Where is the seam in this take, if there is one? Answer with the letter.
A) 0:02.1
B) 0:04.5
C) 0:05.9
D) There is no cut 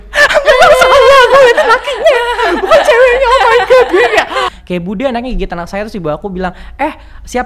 B